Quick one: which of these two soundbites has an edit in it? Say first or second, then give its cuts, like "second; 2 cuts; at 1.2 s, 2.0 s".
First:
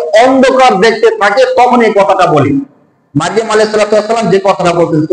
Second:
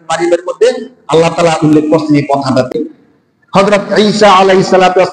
second; 1 cut; at 2.7 s